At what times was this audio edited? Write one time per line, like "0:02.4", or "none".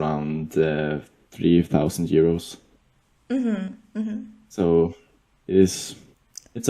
none